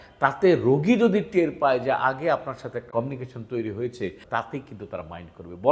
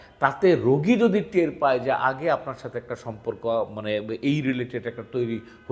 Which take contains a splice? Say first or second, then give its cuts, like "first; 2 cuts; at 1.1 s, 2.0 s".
first; 2 cuts; at 2.9 s, 4.2 s